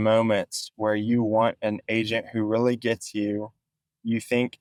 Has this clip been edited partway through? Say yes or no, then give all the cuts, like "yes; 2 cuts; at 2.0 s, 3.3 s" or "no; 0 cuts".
no; 0 cuts